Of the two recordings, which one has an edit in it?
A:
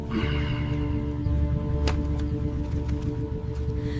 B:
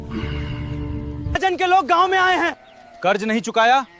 B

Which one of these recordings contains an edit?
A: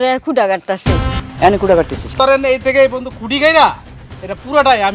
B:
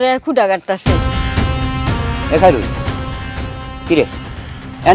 A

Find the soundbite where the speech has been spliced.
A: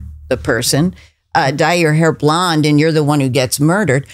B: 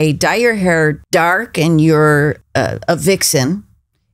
B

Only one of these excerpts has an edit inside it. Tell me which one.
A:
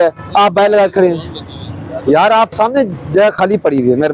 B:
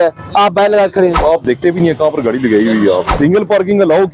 B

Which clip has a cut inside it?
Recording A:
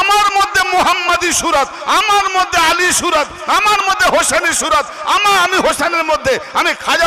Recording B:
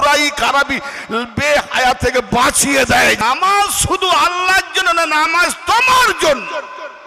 B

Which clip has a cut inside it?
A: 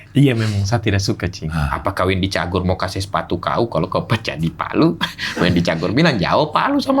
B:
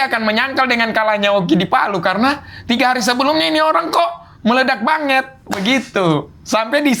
A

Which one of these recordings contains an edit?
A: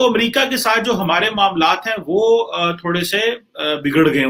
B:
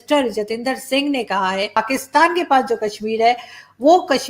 B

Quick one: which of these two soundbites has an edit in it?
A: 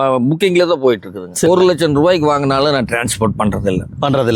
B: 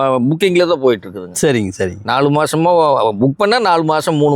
A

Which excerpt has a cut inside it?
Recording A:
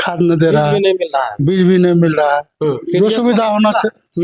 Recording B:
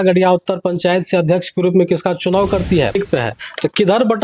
B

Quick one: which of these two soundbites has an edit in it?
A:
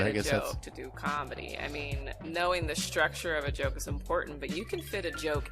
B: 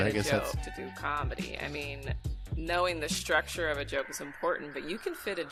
A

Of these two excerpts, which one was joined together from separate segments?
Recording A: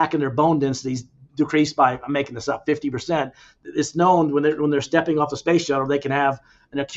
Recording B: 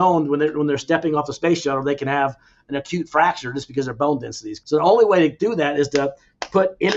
B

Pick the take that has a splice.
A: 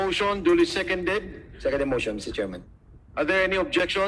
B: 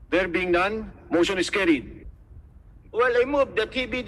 B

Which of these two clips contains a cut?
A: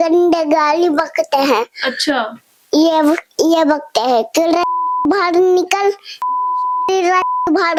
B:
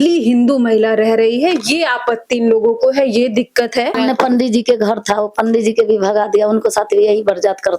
B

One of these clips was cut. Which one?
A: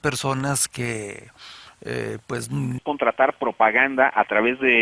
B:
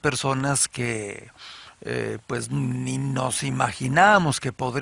B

